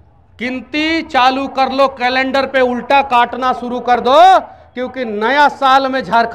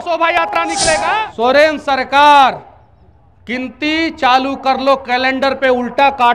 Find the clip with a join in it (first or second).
second